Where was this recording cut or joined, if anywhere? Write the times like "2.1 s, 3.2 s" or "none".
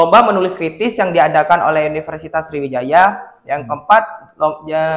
none